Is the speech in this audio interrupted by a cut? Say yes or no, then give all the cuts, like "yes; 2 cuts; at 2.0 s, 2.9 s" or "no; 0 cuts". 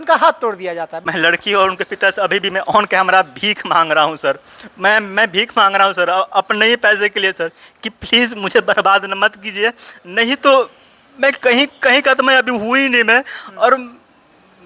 no; 0 cuts